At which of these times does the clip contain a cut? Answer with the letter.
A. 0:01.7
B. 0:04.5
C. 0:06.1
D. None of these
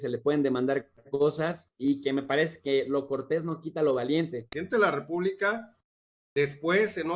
B